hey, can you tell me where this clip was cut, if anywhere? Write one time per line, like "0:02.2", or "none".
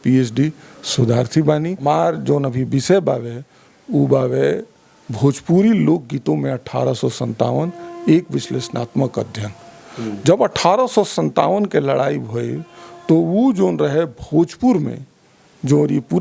0:01.8